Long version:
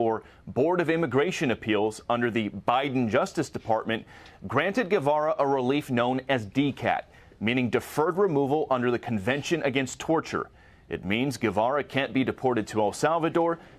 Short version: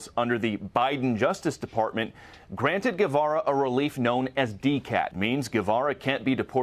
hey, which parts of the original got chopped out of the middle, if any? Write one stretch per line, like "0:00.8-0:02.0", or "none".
0:07.1-0:11.0

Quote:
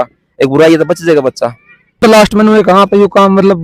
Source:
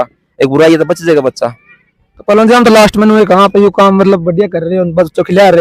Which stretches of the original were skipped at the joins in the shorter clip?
0:02.0-0:02.6

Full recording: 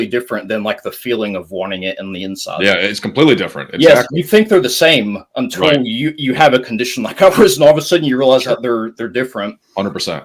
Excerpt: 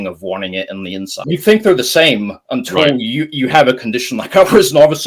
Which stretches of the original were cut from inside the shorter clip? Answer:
0:02.5-0:04.1

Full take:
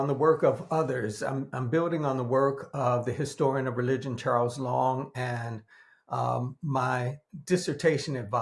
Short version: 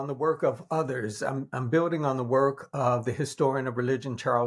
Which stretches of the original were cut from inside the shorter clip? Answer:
none

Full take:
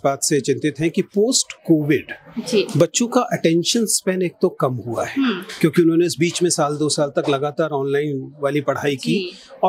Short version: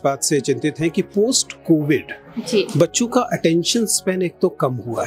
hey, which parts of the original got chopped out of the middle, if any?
none

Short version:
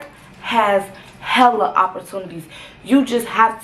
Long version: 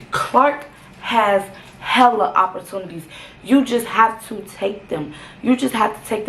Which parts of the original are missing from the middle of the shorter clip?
none

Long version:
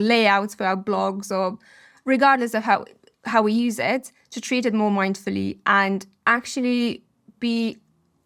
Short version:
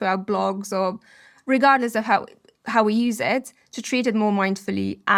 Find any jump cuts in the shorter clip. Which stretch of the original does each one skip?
none

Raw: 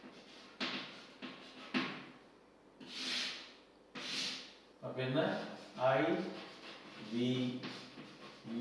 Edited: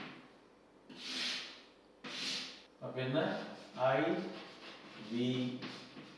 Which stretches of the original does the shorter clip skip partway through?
0:04.6-0:04.7

